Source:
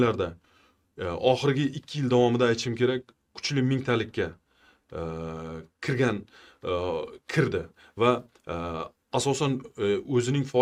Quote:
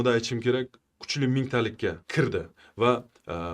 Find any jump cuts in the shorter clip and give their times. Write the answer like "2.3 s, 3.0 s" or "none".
2.0 s